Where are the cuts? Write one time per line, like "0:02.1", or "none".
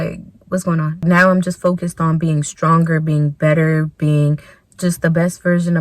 0:01.0